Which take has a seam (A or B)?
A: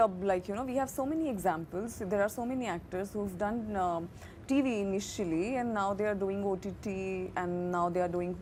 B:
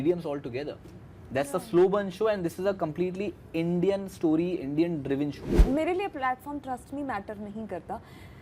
B